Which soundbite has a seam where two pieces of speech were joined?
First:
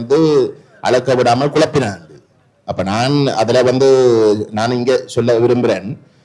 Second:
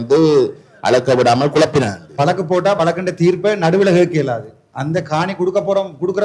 second; 1 cut; at 2.2 s

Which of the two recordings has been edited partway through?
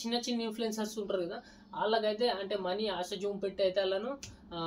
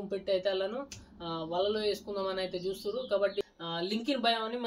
second; 1 cut; at 3.4 s

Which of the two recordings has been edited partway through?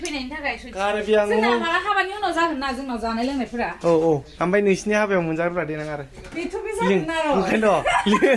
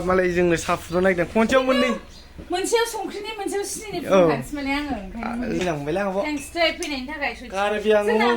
second; 1 cut; at 5.6 s

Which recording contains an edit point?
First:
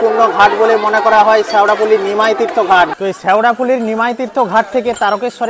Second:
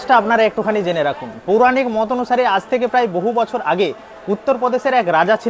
first; 1 cut; at 2.9 s

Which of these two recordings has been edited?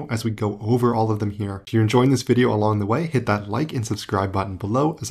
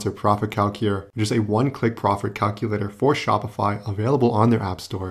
first; 1 cut; at 1.5 s

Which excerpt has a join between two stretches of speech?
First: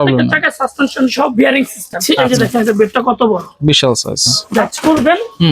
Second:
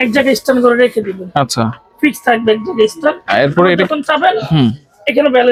first; 2 cuts; at 2.2 s, 4.7 s

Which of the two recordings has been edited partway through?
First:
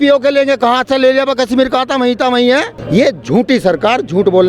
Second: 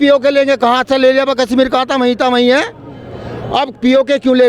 first; 1 cut; at 2.8 s

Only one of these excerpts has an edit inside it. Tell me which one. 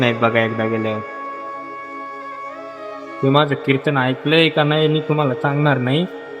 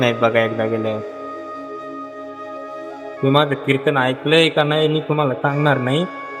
first; 2 cuts; at 1.0 s, 2.5 s

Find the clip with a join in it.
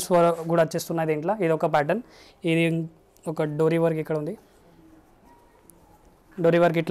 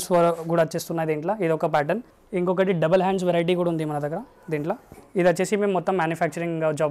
second; 2 cuts; at 2.2 s, 4.9 s

